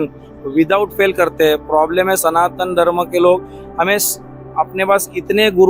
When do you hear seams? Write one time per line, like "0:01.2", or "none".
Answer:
none